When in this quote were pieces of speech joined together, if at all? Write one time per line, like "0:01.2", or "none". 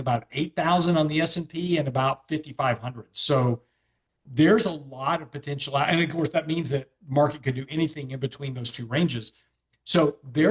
none